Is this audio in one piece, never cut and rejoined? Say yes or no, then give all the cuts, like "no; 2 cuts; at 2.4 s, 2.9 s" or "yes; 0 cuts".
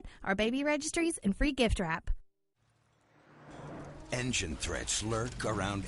no; 1 cut; at 2.6 s